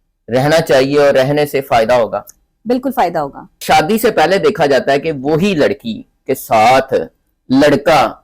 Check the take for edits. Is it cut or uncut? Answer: cut